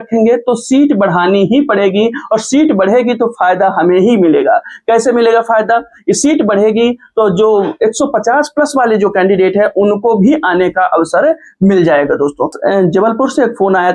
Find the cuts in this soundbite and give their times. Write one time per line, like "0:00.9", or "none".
0:12.5